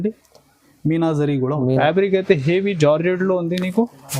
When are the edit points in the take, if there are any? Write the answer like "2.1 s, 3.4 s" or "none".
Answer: 1.8 s